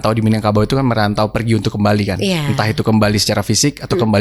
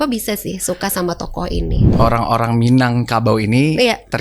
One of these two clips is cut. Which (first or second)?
second